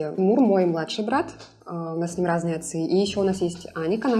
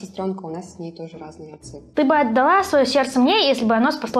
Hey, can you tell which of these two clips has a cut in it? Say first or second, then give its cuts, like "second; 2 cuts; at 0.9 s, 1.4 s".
second; 1 cut; at 1.9 s